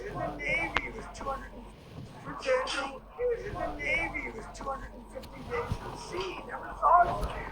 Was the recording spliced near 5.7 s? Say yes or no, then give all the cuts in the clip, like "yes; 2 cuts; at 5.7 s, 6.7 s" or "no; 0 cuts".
no; 2 cuts; at 2.1 s, 3.0 s